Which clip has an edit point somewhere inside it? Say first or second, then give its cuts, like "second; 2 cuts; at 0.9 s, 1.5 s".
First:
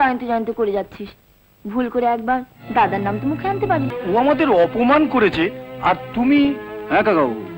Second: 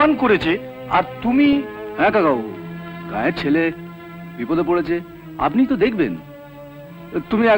first; 1 cut; at 3.9 s